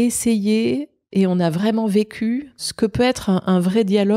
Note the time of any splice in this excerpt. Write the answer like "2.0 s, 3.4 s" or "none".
2.6 s

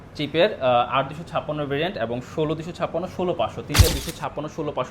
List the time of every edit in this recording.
3.9 s

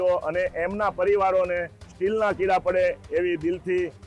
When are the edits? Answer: none

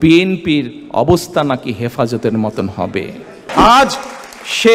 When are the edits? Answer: 3.5 s

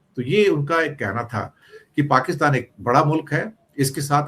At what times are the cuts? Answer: none

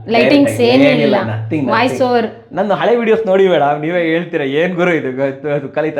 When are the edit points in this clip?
none

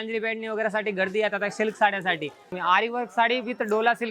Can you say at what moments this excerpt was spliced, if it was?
2.6 s

